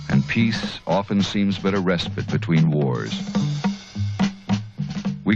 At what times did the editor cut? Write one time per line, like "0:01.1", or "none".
0:02.9